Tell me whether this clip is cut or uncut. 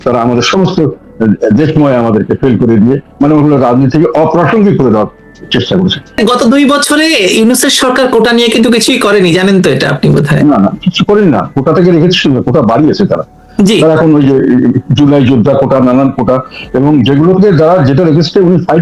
cut